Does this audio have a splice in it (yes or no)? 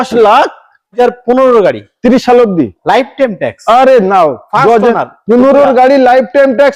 yes